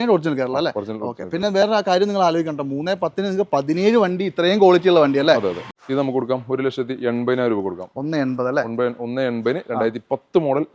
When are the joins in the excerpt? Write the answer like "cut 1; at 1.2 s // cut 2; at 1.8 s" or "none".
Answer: cut 1; at 5.6 s